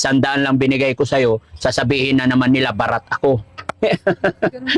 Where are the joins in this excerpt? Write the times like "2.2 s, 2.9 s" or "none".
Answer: none